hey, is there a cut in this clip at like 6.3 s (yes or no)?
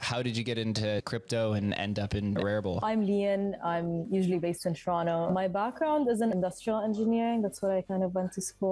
yes